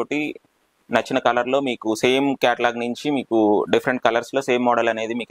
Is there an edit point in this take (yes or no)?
no